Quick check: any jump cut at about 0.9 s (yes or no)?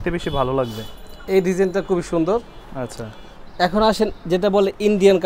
no